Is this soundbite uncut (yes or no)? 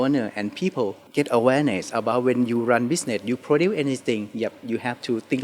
no